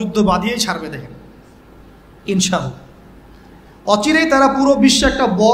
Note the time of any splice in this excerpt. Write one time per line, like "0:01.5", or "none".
none

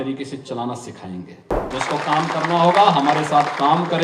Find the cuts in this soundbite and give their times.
0:01.7

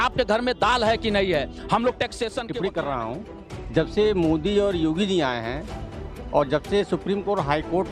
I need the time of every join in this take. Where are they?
0:02.4

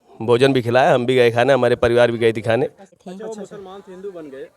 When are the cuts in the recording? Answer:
0:03.0

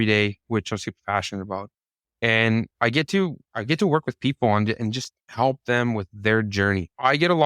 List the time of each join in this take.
0:05.3

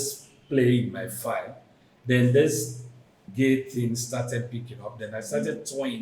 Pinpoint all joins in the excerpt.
0:03.2

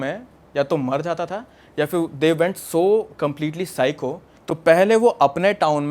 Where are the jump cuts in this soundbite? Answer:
0:04.3

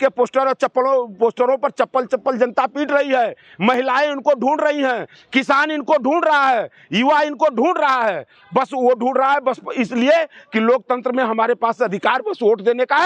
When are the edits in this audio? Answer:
none

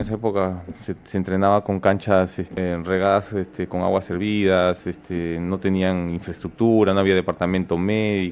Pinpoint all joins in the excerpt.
0:02.6

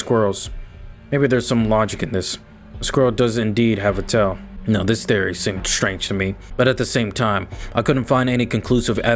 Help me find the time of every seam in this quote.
0:04.5
0:06.4

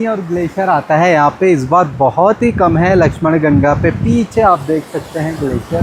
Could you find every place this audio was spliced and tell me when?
none

